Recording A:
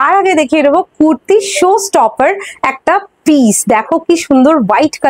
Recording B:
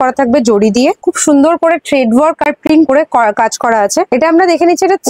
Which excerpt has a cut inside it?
B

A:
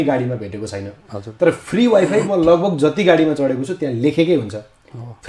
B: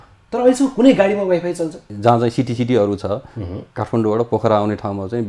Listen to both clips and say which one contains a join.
B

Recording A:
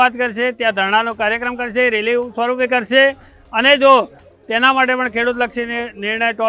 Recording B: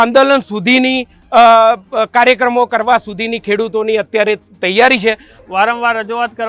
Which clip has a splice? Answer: B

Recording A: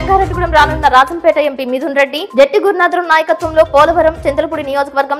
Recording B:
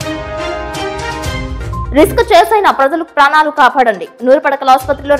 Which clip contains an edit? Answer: B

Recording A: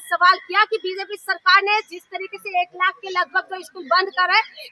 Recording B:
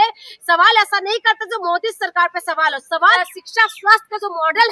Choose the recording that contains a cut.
B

